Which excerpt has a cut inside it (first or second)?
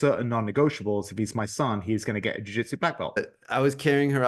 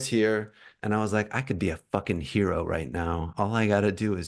first